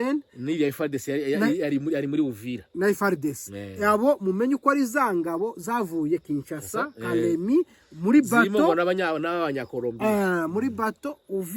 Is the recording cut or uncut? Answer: uncut